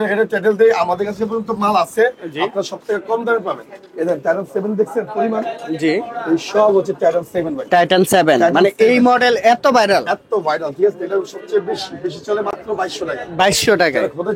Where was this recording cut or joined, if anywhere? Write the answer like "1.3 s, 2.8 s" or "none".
none